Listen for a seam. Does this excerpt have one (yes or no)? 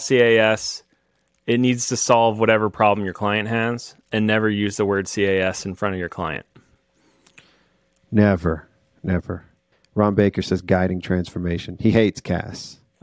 no